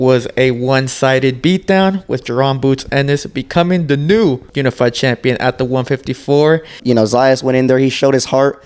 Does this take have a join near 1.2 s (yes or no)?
no